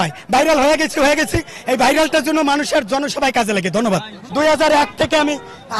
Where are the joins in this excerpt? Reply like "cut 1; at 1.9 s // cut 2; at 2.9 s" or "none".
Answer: cut 1; at 4.2 s